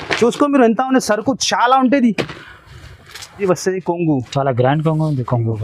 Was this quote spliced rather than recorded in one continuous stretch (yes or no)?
yes